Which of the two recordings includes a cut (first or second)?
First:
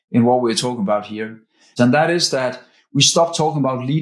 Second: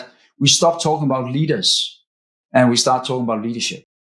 first